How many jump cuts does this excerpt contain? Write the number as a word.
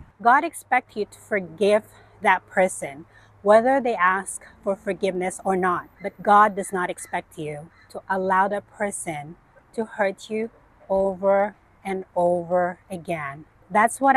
zero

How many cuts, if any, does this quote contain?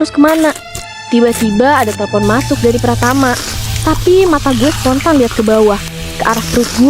one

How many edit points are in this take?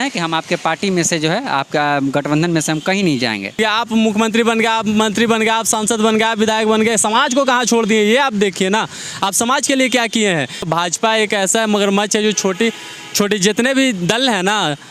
two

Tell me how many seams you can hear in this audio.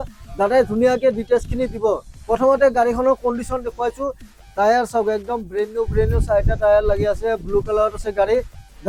zero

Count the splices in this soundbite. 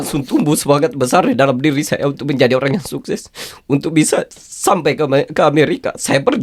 zero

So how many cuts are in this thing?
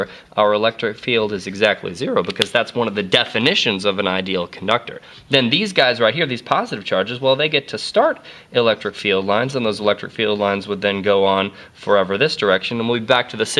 one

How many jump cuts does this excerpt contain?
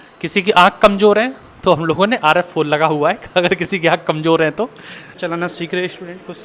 one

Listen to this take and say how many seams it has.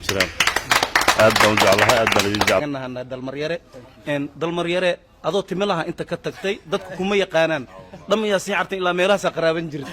one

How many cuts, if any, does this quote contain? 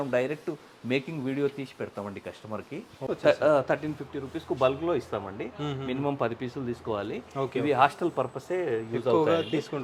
one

